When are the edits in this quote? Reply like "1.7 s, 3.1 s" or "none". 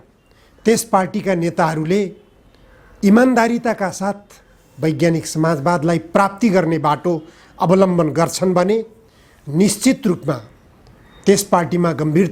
none